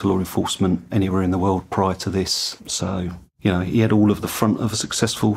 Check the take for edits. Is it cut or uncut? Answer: cut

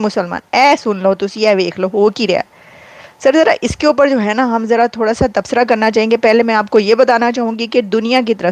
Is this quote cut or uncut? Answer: uncut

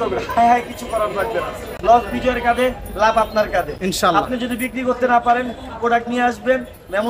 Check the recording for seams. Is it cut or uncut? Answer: uncut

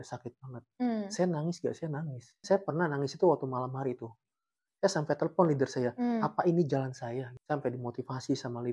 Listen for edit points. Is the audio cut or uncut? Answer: cut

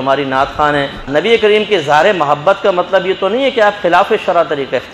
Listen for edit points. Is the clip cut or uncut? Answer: cut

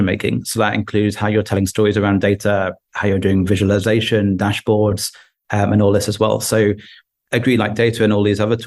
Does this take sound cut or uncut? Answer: uncut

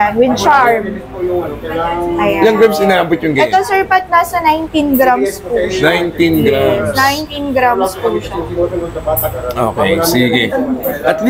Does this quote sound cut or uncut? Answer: uncut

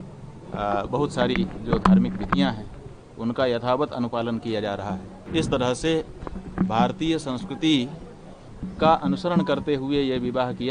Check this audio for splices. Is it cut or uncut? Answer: cut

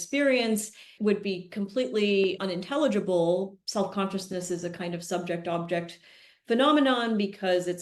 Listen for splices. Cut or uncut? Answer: cut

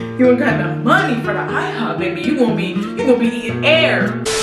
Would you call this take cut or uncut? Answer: uncut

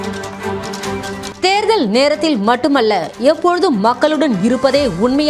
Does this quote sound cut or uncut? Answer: uncut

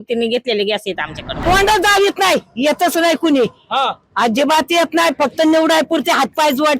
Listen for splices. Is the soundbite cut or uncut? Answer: cut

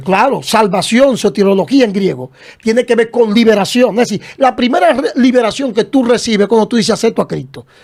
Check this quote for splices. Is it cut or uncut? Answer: uncut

